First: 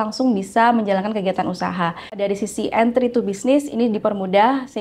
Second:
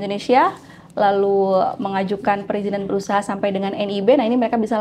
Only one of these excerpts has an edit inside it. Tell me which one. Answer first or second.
first